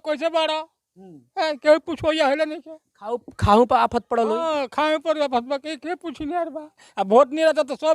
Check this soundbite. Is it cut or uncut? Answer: uncut